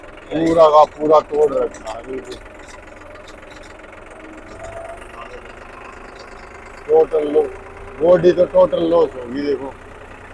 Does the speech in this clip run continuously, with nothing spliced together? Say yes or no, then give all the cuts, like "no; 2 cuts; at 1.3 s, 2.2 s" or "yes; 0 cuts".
yes; 0 cuts